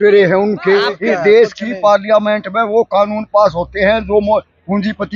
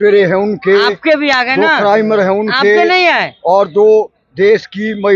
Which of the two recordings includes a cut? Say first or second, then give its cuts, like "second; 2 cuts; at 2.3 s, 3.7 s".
first; 1 cut; at 0.9 s